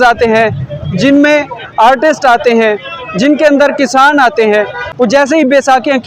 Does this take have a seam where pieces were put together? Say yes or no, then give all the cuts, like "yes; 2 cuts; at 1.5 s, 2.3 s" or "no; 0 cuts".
yes; 1 cut; at 4.8 s